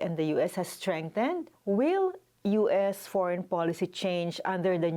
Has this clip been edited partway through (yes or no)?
yes